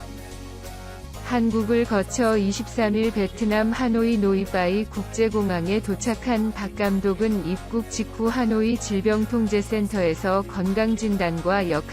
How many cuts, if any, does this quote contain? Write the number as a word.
one